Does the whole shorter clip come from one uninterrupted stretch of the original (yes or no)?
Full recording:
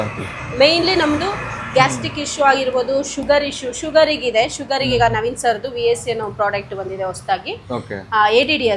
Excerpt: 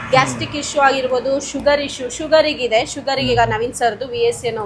yes